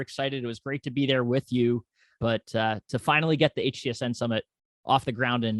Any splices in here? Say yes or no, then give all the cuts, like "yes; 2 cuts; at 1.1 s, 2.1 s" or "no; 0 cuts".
yes; 1 cut; at 2.2 s